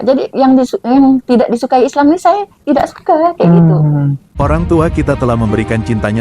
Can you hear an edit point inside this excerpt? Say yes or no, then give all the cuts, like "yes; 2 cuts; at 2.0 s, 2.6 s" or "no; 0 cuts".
yes; 1 cut; at 4.4 s